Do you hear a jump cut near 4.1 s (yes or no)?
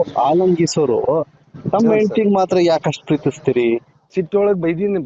yes